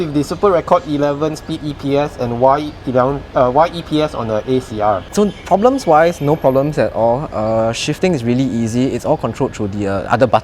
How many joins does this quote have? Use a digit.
1